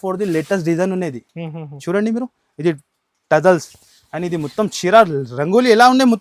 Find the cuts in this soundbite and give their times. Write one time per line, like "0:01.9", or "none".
none